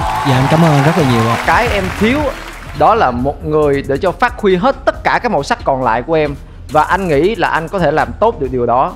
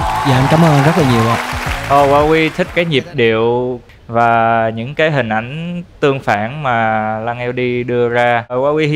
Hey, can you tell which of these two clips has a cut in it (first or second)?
first